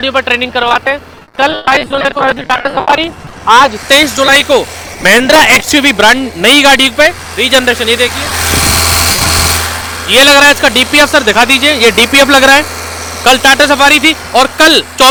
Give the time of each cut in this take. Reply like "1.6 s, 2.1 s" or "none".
none